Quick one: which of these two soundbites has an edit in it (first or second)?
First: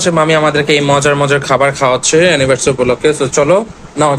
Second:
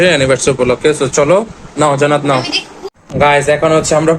second